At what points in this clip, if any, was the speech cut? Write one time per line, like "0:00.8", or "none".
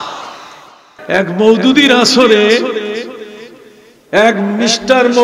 0:00.9